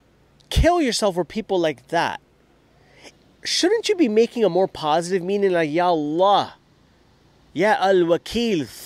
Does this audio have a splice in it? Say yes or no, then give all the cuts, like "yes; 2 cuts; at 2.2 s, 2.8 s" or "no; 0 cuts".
no; 0 cuts